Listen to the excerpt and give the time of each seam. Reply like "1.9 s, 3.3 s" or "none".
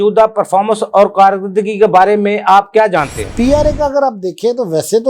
3.2 s